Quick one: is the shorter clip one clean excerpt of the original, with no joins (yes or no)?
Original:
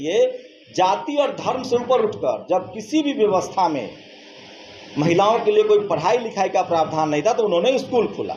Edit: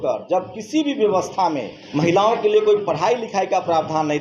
no